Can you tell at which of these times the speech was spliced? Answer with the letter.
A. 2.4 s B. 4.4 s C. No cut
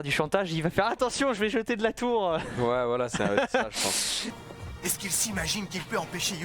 B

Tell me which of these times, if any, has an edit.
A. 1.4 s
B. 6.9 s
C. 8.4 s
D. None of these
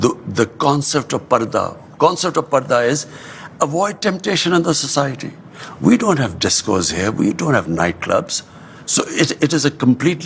D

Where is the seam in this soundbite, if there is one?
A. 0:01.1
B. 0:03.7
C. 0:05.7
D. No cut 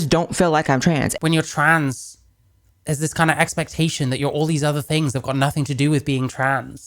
A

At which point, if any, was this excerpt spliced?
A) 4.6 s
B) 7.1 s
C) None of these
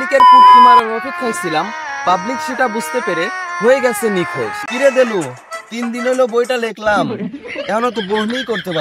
A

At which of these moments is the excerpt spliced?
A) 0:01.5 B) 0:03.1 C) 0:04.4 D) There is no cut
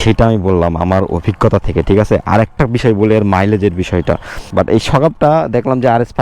C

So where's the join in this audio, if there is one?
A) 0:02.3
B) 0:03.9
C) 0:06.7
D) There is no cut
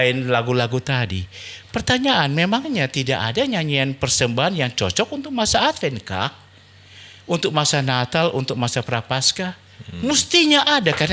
D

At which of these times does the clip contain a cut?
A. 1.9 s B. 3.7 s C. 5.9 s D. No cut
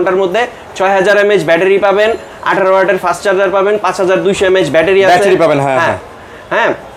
D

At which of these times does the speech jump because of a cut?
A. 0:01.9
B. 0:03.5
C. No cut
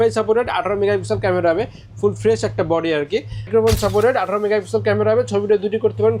B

